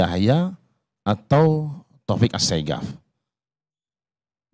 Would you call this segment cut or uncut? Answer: uncut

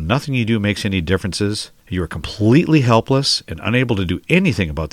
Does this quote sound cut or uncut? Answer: cut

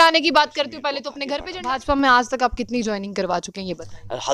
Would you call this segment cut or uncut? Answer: cut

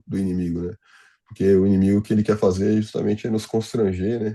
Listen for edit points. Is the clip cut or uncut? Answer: uncut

